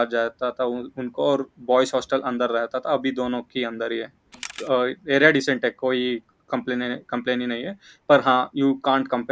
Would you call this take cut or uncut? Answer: cut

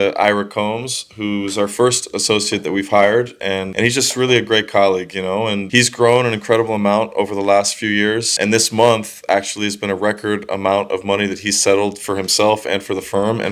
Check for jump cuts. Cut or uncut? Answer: uncut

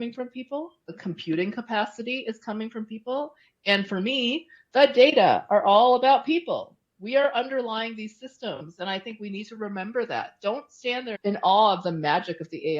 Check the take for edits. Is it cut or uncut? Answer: cut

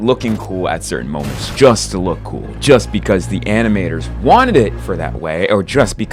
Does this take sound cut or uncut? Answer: uncut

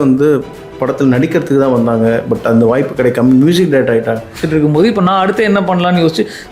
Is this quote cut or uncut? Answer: cut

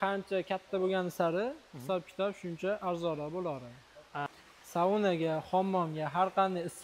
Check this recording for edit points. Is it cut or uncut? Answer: cut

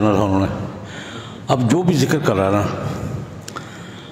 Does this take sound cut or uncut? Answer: uncut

